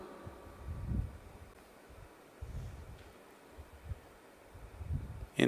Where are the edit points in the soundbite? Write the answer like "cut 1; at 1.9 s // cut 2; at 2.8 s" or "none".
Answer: none